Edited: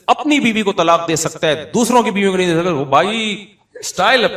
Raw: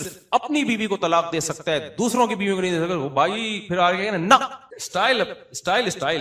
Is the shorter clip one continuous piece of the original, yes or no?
no